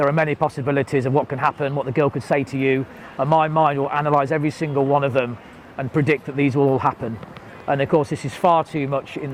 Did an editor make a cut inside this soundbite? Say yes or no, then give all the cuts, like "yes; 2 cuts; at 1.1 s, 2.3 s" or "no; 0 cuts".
no; 0 cuts